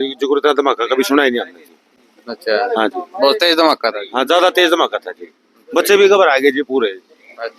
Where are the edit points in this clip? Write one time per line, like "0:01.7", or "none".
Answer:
none

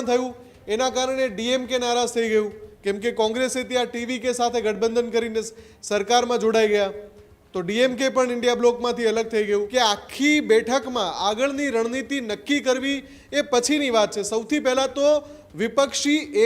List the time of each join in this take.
0:09.7

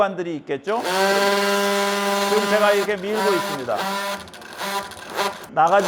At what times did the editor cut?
none

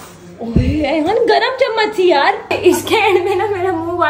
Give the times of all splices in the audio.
0:02.5

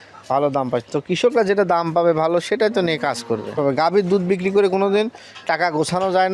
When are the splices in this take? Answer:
0:03.5

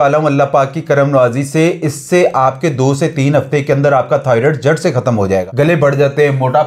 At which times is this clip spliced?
0:05.4

